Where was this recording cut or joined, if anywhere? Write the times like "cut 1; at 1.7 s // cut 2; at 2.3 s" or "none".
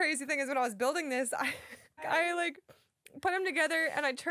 cut 1; at 2.0 s